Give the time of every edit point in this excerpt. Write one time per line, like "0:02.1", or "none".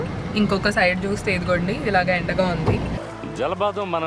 0:03.0